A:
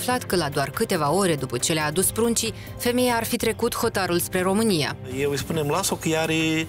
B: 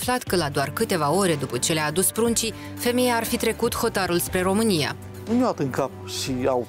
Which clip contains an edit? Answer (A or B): B